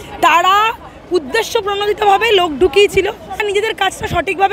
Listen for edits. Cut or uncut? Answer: cut